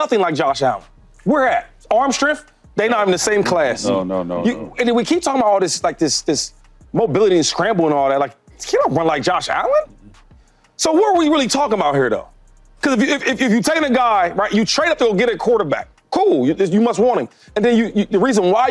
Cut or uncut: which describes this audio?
uncut